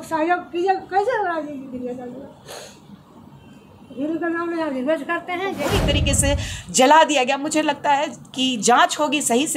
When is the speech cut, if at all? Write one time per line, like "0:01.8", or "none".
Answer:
0:05.6